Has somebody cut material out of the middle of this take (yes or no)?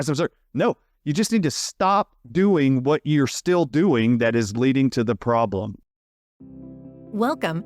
yes